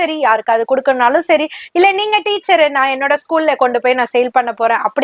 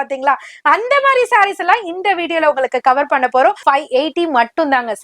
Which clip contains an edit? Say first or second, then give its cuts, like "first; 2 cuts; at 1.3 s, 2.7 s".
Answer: second; 1 cut; at 3.6 s